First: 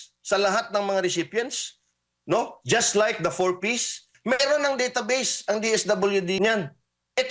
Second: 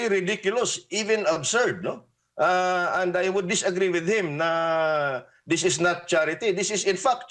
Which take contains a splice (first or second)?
first